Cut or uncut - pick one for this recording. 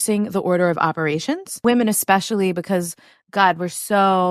cut